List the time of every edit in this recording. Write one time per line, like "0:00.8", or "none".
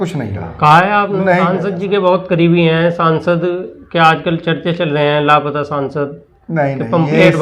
0:01.7